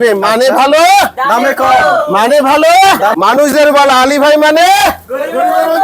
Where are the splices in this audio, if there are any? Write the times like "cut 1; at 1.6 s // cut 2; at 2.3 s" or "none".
cut 1; at 3.1 s